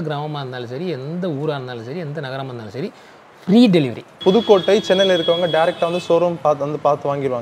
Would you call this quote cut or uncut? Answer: cut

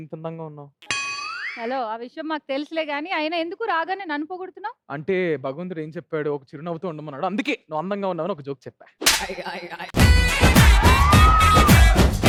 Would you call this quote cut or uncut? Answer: uncut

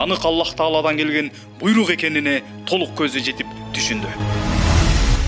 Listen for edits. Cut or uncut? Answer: cut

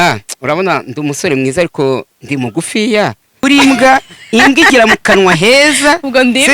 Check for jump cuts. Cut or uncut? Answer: cut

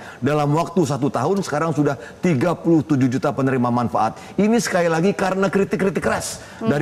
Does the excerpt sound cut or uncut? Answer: uncut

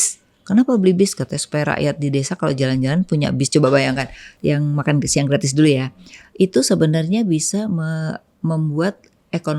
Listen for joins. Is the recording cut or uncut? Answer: cut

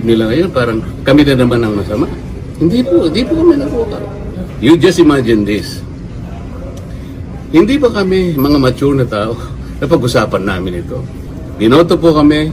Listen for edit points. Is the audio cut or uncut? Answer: uncut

